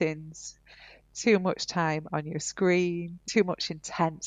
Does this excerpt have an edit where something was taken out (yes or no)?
yes